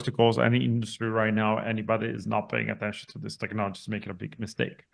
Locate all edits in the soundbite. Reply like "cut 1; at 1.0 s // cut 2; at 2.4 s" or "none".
none